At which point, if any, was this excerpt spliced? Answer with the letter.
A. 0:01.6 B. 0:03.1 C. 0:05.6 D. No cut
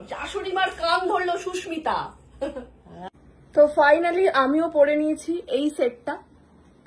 B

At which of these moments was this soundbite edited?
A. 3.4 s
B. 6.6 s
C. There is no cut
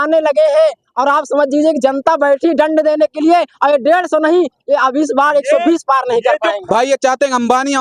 B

